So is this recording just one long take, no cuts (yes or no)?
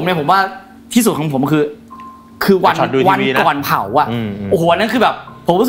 yes